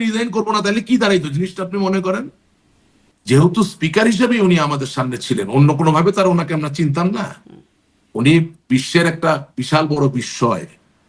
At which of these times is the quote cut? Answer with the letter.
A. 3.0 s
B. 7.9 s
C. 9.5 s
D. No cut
A